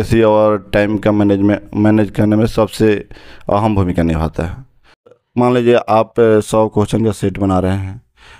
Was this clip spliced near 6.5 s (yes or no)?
no